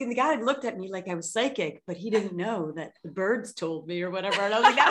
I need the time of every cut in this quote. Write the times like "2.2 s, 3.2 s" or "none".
none